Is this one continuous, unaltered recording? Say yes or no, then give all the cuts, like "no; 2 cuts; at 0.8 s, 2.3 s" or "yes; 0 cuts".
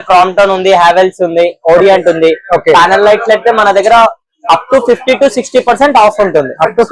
yes; 0 cuts